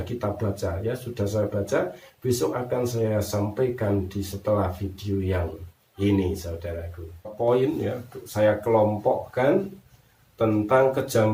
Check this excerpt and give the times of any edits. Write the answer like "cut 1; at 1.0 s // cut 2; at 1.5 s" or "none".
cut 1; at 7.3 s